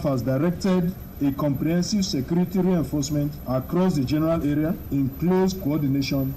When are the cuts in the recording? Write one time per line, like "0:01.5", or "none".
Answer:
0:04.8